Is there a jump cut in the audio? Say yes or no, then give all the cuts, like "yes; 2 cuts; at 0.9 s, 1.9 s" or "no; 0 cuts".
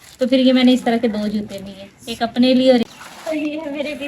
yes; 1 cut; at 3.2 s